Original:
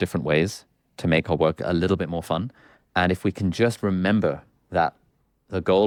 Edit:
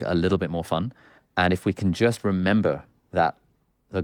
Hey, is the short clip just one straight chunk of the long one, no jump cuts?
yes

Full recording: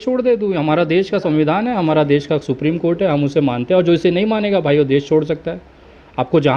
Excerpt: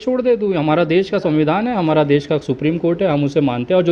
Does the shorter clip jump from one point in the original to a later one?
no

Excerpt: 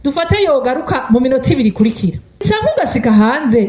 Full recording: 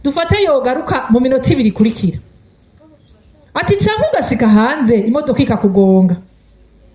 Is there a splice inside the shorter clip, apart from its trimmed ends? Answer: yes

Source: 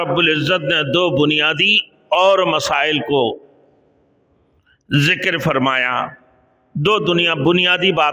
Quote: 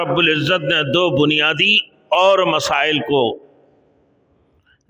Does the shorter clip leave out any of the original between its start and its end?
no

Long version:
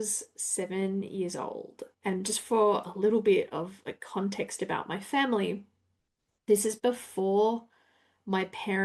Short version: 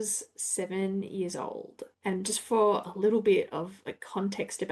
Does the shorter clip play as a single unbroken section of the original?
yes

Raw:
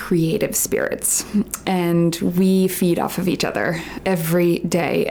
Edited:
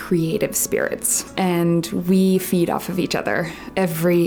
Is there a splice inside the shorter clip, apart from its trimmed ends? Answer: yes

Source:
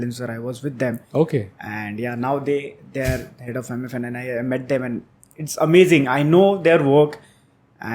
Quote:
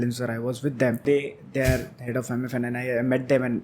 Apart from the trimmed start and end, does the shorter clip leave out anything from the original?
yes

